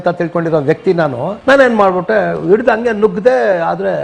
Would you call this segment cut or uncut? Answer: uncut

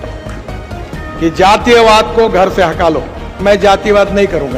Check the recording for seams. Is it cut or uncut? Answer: cut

